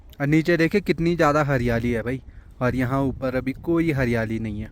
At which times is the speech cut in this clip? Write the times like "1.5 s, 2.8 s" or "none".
none